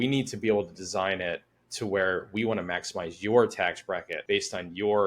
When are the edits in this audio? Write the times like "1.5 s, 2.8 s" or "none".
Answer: 4.1 s